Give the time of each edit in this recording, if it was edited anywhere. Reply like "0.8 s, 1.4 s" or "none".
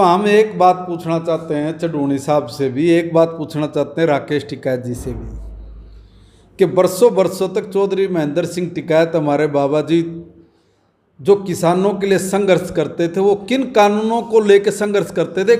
none